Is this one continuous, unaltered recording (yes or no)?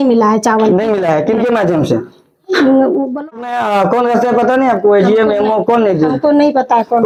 yes